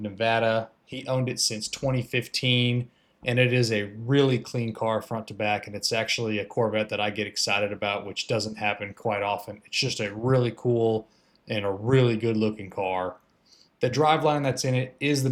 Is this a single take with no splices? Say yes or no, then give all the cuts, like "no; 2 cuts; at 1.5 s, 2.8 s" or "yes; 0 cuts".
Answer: yes; 0 cuts